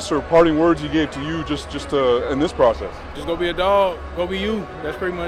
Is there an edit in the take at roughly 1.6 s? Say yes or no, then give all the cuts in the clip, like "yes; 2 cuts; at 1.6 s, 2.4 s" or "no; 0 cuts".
no; 0 cuts